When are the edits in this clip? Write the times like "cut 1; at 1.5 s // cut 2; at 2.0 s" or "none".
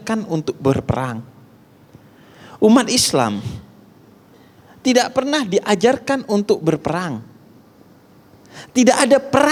none